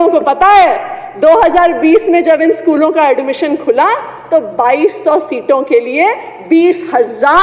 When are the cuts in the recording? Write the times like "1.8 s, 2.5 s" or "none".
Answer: none